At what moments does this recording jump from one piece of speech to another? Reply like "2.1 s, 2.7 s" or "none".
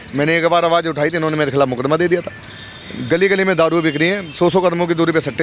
none